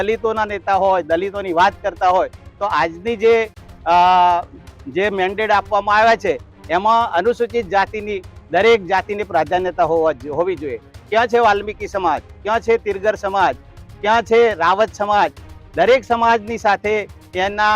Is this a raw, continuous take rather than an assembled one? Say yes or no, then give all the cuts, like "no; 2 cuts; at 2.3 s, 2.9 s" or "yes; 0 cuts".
yes; 0 cuts